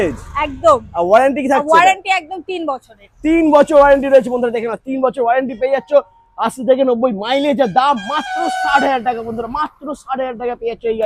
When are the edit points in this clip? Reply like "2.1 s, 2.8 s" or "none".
none